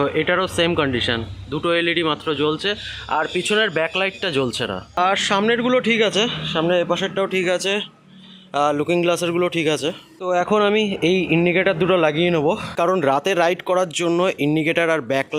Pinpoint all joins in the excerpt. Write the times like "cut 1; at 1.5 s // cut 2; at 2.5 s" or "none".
none